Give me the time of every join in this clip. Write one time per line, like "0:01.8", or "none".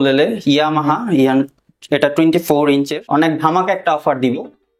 0:03.0

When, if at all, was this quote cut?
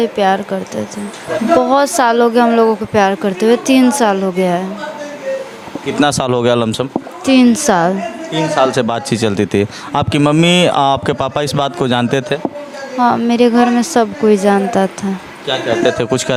none

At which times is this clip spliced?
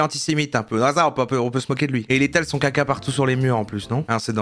0:02.0

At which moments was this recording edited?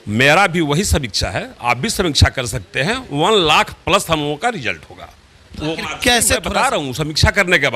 0:06.5

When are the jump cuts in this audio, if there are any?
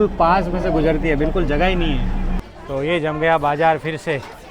0:02.5

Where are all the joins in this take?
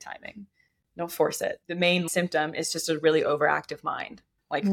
0:01.7

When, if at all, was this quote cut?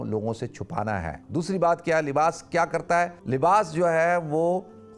0:01.2
0:03.2

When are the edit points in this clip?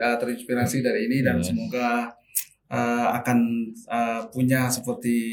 none

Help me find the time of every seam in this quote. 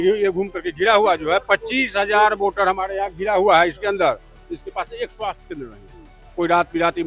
none

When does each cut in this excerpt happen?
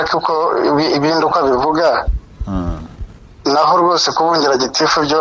none

